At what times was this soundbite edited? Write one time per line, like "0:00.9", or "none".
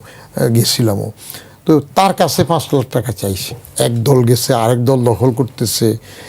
0:03.7